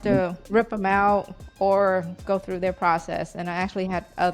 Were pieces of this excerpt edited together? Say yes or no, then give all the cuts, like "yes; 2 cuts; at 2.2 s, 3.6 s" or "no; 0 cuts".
yes; 1 cut; at 2.2 s